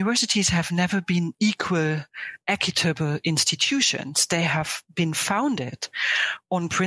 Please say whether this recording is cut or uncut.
cut